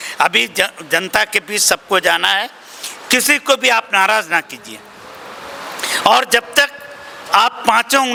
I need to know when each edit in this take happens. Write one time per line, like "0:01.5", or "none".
none